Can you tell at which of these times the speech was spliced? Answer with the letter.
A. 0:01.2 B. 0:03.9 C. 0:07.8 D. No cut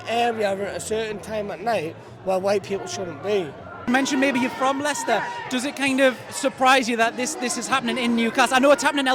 B